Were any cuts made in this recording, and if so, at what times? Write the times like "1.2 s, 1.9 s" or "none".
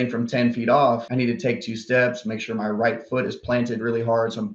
none